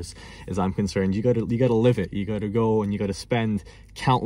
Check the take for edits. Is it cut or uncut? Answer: uncut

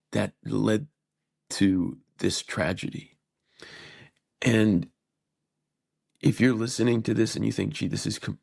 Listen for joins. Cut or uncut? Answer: uncut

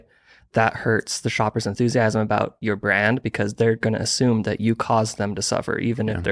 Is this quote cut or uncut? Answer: cut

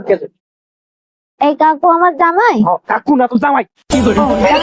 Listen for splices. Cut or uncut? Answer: uncut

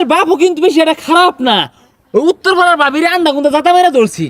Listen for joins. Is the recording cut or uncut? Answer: uncut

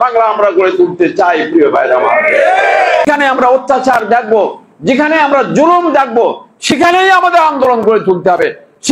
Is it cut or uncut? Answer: cut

